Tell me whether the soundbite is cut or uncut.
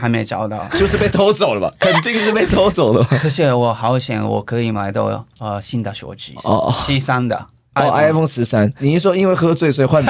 cut